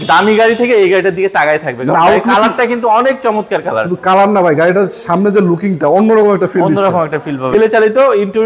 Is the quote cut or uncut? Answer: cut